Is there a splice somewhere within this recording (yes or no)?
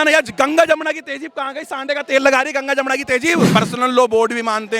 yes